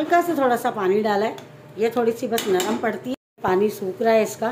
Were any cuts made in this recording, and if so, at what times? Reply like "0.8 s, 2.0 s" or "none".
3.1 s

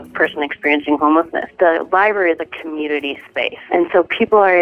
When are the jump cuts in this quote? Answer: 1.5 s, 3.6 s

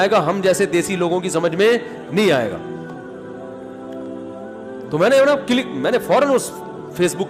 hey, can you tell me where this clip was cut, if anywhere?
3.0 s, 4.5 s

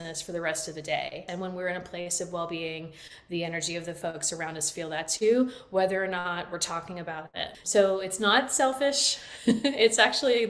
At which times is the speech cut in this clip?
1.2 s, 7.6 s

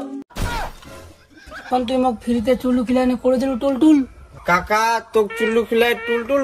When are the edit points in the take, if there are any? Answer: 1.7 s

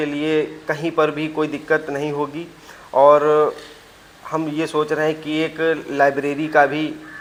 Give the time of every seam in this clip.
none

